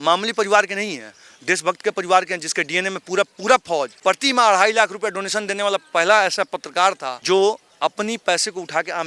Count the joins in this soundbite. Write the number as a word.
two